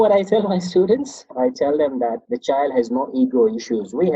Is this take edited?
yes; 2 cuts; at 1.2 s, 2.3 s

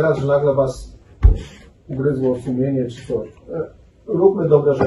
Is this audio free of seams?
yes; 0 cuts

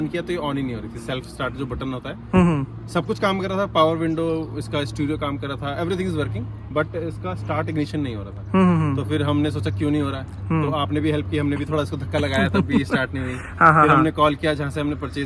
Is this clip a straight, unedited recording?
yes; 0 cuts

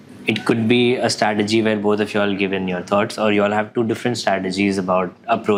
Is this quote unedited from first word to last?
yes; 0 cuts

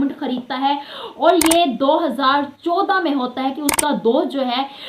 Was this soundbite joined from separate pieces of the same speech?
no; 0 cuts

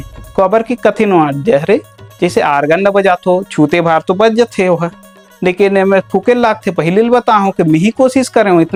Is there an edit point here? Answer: no; 0 cuts

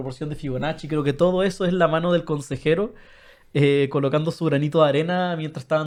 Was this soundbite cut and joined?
no; 0 cuts

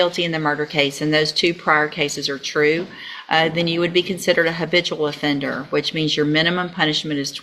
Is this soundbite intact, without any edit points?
yes; 0 cuts

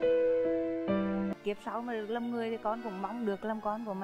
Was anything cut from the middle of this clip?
yes; 1 cut; at 1.3 s

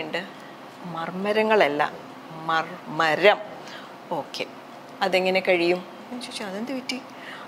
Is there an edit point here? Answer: no; 0 cuts

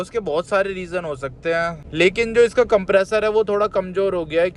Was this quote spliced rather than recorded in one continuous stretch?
yes; 1 cut; at 1.8 s

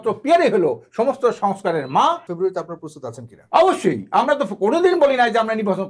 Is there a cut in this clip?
yes; 1 cut; at 2.3 s

